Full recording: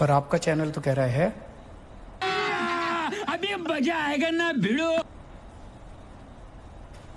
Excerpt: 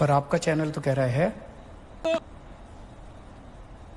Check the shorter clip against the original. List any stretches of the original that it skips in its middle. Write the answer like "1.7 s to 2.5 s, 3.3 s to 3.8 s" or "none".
2.0 s to 4.9 s

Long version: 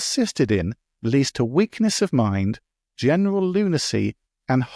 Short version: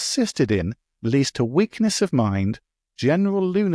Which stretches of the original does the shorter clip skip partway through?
none

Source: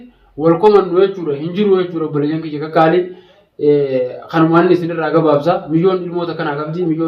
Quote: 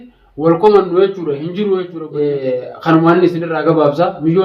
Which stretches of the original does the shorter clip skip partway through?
2.0 s to 3.4 s

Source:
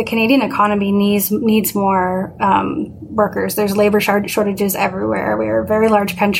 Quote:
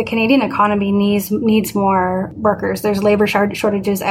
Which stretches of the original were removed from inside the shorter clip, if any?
2.3 s to 3.0 s

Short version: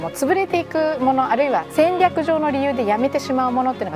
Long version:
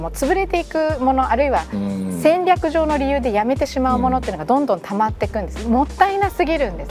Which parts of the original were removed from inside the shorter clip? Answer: 1.7 s to 2.1 s

